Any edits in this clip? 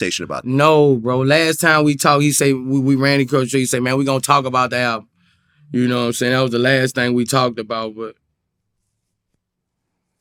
no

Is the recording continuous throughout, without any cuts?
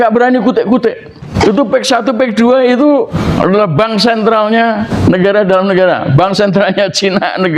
no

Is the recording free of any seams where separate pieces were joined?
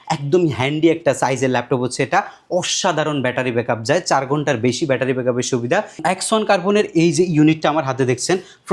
no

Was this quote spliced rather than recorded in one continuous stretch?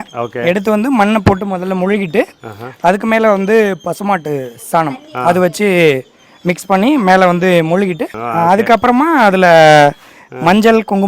yes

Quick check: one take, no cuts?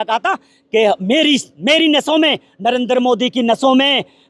yes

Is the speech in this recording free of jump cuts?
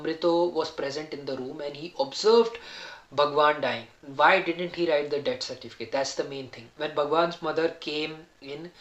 no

